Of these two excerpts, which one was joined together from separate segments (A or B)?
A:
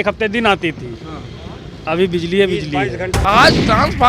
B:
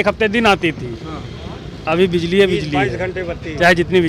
A